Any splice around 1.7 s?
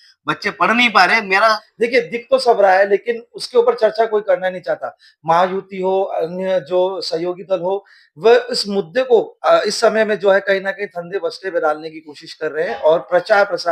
yes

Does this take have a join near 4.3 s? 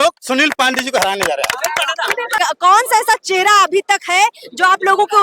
no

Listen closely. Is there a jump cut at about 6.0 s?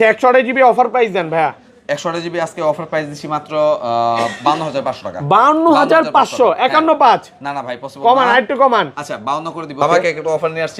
no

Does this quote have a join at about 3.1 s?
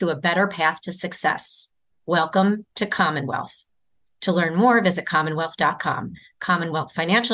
no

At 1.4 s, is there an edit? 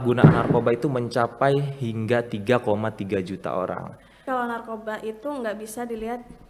no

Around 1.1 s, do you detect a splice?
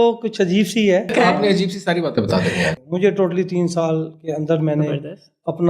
yes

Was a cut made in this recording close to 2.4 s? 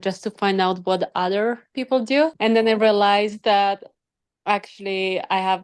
yes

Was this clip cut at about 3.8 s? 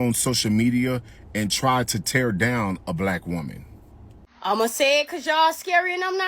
yes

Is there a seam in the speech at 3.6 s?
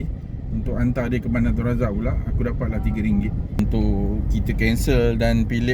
yes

